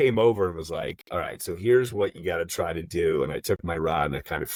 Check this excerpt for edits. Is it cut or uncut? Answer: uncut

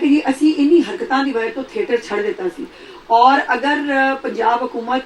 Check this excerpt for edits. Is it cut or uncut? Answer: uncut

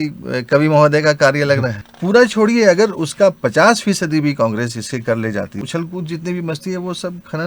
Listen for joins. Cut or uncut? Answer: cut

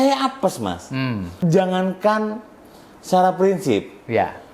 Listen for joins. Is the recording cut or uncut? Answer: cut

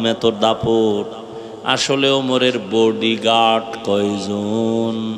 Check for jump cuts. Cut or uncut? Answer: uncut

